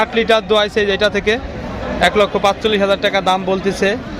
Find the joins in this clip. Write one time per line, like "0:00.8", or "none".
none